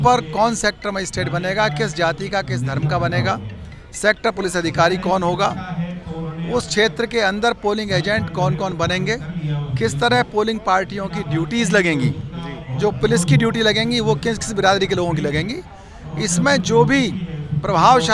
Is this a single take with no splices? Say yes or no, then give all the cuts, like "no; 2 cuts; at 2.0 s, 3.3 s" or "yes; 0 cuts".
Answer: yes; 0 cuts